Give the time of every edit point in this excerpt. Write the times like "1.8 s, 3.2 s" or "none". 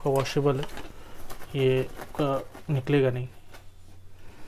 none